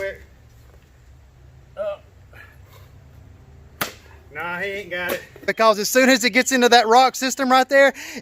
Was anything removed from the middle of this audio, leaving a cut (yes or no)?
yes